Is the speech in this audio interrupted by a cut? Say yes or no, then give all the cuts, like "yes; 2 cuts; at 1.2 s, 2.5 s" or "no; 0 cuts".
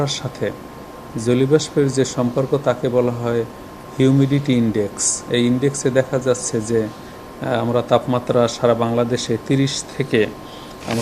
no; 0 cuts